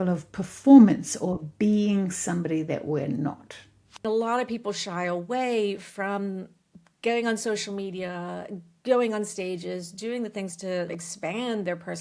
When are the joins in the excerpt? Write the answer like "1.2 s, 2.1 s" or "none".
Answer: 4.0 s, 10.9 s

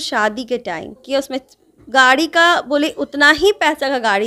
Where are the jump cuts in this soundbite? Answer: 1.0 s

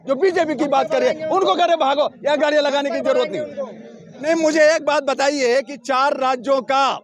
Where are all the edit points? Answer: 4.0 s

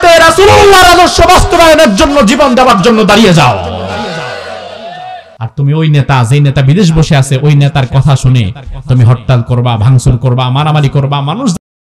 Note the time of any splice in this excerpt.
5.3 s

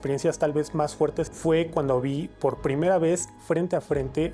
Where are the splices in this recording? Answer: 1.3 s

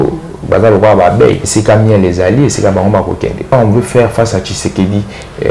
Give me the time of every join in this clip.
1.4 s, 3.5 s

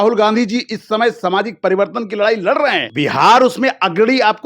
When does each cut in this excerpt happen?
2.9 s

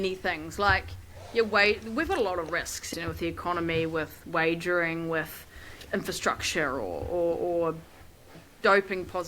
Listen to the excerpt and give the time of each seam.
2.8 s, 5.7 s, 8.4 s

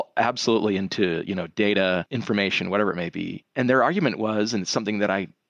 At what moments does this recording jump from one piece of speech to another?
2.1 s, 3.4 s

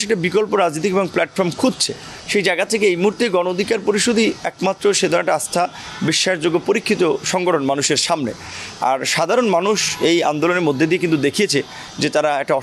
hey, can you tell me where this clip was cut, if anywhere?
none

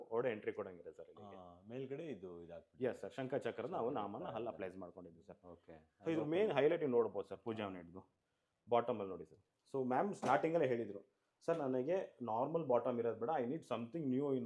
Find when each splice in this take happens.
none

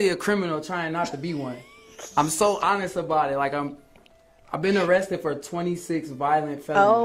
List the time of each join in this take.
none

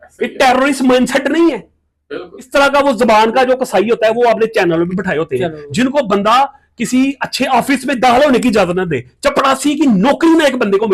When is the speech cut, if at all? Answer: 2.4 s

